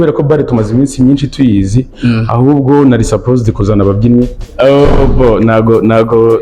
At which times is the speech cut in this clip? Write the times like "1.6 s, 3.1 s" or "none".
4.4 s